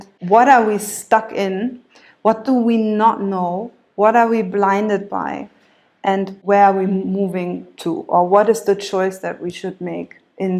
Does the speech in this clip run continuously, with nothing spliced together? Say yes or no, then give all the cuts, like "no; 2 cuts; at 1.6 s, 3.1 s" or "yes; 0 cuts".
yes; 0 cuts